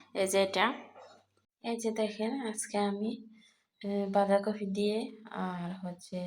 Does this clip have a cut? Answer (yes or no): yes